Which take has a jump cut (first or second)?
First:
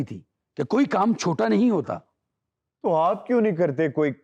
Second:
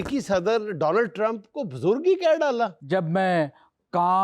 second